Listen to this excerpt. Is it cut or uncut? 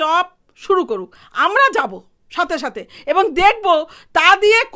uncut